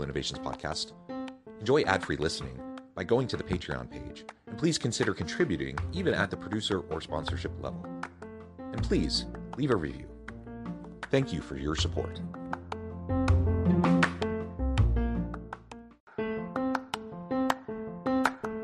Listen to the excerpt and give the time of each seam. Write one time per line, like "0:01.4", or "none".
0:16.1